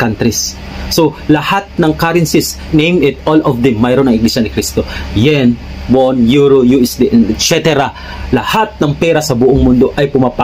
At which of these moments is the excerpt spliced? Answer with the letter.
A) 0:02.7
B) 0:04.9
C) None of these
A